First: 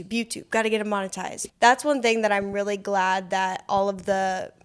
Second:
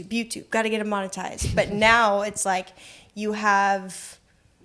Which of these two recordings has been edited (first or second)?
first